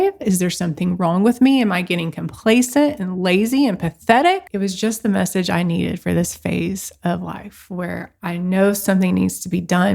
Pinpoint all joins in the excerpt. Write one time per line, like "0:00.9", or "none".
0:04.5